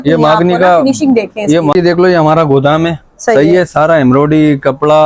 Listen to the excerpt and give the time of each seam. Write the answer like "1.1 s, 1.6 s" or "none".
1.7 s